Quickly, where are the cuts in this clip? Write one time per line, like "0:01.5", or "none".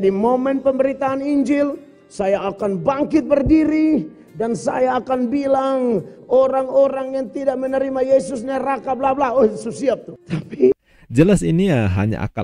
0:10.8